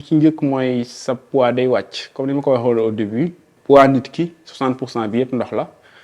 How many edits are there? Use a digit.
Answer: 1